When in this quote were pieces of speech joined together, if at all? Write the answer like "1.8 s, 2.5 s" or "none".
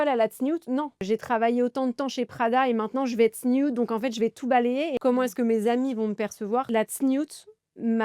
1.0 s, 5.0 s, 6.7 s